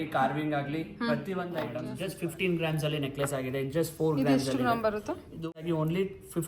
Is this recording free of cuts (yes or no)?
no